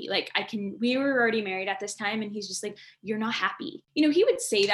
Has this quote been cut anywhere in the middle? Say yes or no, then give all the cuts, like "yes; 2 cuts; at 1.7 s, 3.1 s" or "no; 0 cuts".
yes; 1 cut; at 3.8 s